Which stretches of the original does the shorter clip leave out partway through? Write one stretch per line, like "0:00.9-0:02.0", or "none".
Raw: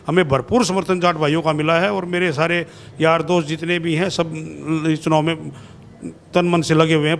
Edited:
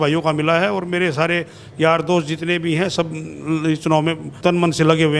0:05.5-0:06.2